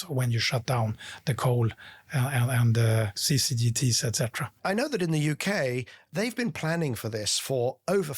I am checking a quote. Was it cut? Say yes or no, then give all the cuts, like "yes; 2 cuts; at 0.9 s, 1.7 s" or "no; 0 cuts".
yes; 3 cuts; at 3.2 s, 4.5 s, 6.0 s